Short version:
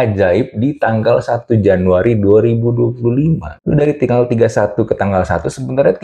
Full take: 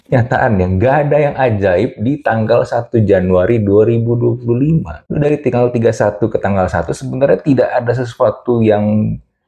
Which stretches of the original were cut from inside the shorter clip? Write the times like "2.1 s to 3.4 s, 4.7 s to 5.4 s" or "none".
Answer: none